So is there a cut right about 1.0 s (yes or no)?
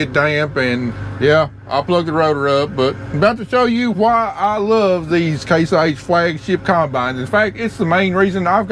yes